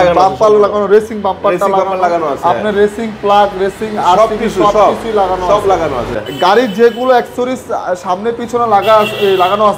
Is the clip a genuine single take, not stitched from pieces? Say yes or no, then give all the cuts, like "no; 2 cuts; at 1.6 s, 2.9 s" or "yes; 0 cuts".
no; 1 cut; at 6.1 s